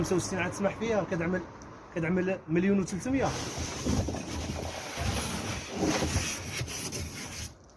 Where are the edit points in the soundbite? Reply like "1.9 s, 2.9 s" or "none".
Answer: none